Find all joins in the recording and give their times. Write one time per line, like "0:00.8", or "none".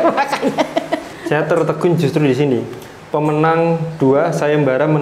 0:01.1